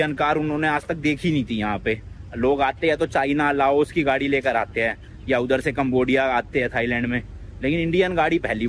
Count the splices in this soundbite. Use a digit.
0